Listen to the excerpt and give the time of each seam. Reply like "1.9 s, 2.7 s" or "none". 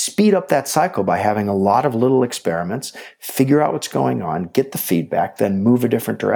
none

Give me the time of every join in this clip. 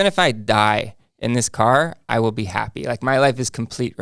none

